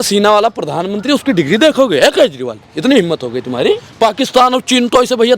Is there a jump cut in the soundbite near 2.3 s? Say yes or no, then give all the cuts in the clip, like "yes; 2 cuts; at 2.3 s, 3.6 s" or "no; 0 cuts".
no; 1 cut; at 3.9 s